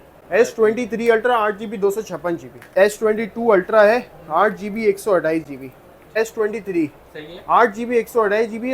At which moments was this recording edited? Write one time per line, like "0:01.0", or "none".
0:02.7
0:06.2